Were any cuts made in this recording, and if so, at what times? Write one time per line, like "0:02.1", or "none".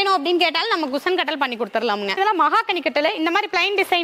0:02.2